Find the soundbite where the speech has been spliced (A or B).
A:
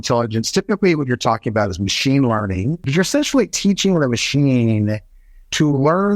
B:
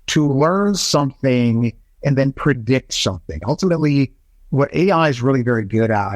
A